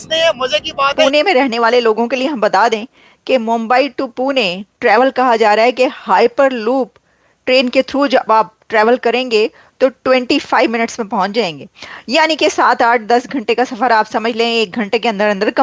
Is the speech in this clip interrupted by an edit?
yes; 1 cut; at 1.1 s

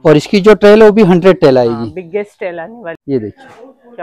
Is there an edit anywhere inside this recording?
yes; 1 cut; at 3.0 s

